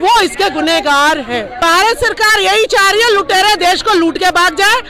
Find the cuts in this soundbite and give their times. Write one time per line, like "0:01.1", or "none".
0:01.5